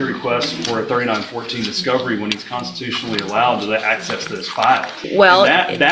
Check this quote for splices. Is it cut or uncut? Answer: cut